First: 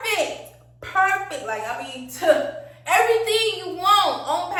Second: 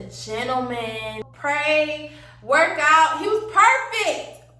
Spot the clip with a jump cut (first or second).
second